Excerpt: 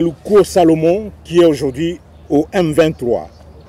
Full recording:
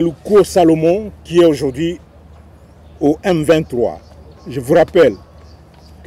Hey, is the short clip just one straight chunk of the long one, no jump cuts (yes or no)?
no